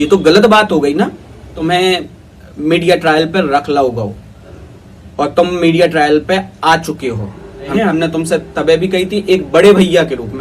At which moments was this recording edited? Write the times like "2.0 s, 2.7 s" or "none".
1.6 s, 7.7 s